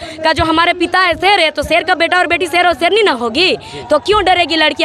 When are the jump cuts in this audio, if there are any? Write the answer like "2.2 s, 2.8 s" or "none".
none